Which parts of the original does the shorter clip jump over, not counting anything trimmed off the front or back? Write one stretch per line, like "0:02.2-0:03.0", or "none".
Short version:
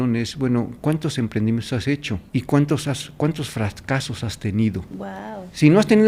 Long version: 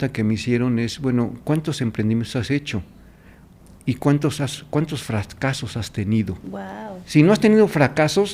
0:02.9-0:03.8

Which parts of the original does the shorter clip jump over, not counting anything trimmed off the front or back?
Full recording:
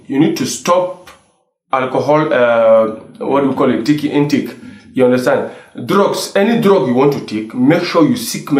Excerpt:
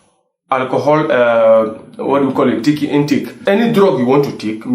0:04.6-0:06.2

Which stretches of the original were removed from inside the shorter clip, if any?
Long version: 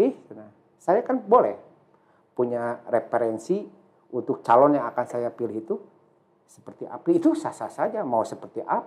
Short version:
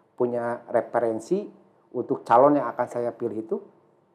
none

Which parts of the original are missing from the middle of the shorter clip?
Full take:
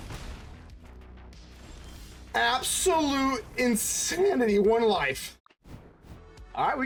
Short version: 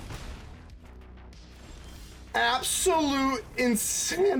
none

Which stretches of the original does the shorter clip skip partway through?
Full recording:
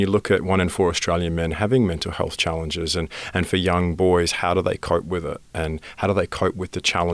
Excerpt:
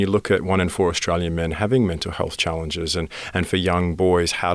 none

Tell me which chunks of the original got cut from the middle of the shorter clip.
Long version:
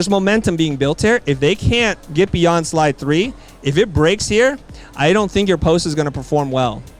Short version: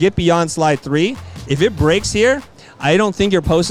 none

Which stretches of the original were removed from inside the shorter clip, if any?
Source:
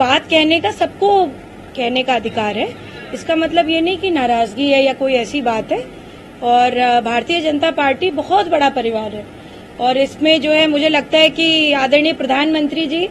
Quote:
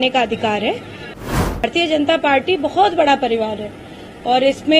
0:03.5-0:07.1

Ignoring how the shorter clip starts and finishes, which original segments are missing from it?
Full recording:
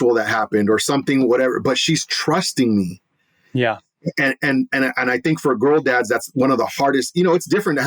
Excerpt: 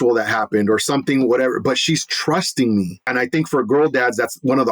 0:03.0-0:05.0

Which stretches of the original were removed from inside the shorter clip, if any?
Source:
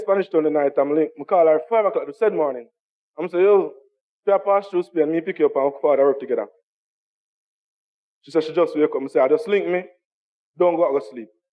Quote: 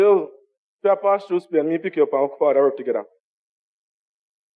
none

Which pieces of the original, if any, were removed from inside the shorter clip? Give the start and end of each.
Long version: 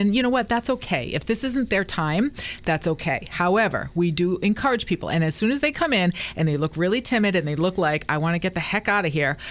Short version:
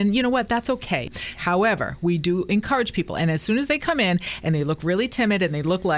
0:01.1-0:03.1

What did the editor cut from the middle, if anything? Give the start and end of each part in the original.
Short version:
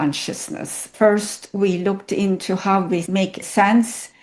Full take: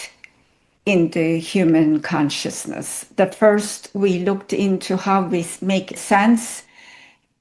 0:03.1-0:03.3
0:05.5-0:05.6

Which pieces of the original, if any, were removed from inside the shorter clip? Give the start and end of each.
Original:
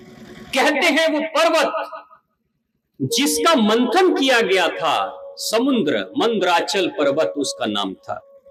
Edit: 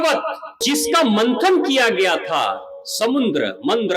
0:02.4-0:03.4

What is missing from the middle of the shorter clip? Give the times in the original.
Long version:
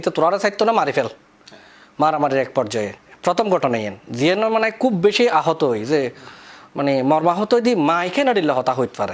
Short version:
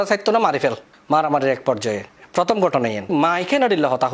0:01.2-0:01.8
0:04.0-0:07.8

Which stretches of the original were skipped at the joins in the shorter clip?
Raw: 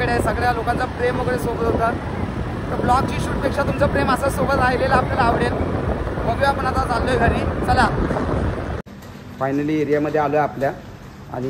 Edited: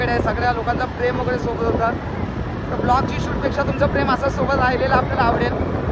none

